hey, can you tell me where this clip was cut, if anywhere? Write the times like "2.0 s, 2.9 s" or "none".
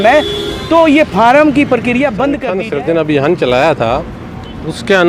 2.5 s